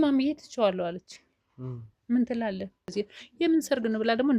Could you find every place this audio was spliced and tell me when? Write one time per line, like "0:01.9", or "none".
0:02.9